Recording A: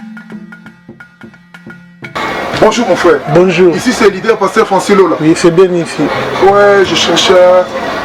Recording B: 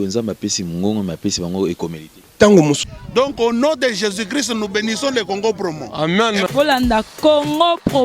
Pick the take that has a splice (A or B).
B